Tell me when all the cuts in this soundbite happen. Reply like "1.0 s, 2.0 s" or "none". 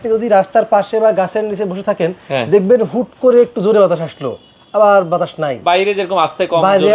none